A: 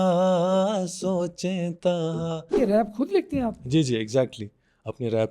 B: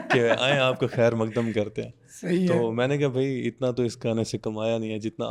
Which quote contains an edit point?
A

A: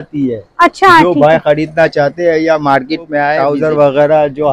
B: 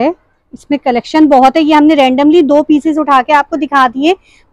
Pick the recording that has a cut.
A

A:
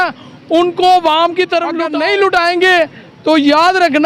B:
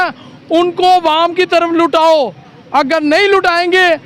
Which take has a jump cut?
A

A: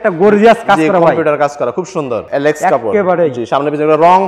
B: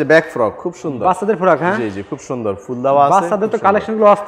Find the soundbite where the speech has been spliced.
A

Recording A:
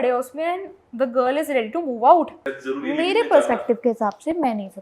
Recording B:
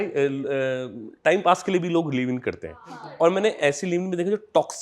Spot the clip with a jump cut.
A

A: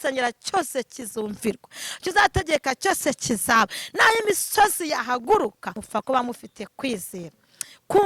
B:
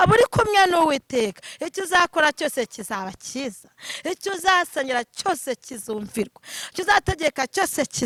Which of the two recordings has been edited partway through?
A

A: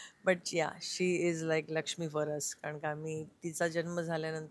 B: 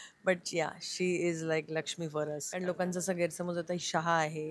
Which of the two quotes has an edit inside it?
B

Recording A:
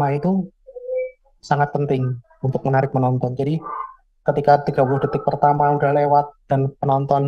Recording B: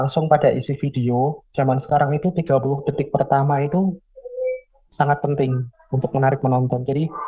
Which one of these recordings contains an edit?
B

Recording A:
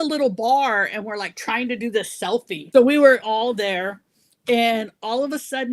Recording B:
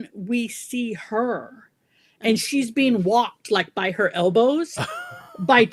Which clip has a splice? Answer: A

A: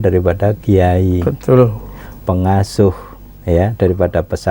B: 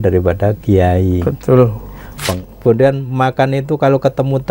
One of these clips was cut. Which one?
B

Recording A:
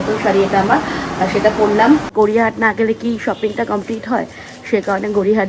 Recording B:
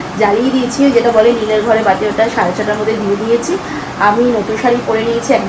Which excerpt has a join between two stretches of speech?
A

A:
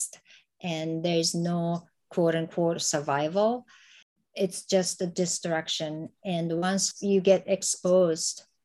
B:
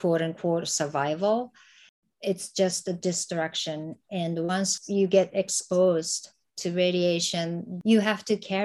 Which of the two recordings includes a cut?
B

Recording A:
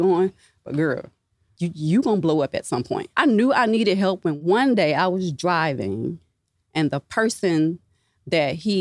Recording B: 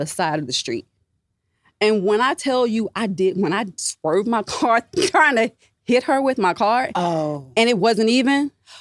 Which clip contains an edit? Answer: A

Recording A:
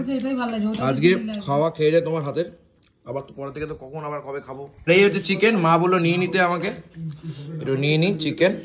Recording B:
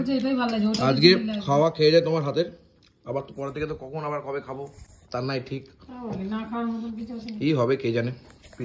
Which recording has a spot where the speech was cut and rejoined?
A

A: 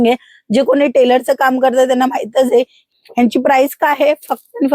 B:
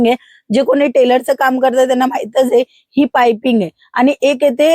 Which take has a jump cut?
A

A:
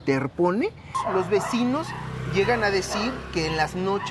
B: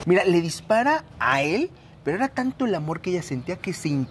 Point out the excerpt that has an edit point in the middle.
A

